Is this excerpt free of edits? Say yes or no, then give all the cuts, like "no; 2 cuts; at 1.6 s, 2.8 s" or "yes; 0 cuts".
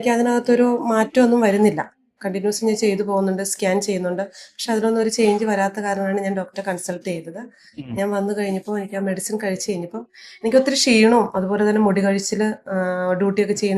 yes; 0 cuts